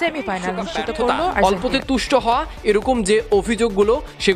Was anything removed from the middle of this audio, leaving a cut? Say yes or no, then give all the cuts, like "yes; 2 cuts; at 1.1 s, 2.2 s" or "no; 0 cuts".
yes; 1 cut; at 1.4 s